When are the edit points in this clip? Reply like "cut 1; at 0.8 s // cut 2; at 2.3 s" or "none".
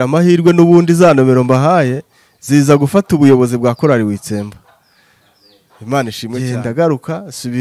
cut 1; at 6.4 s